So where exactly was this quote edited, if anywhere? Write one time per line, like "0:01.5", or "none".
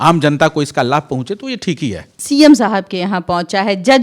0:02.1